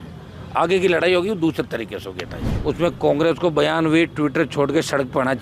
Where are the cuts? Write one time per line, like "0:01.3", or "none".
0:02.5